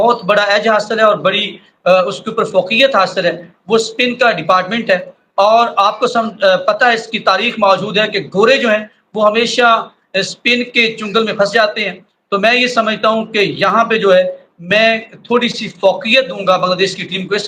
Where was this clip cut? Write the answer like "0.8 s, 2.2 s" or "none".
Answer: none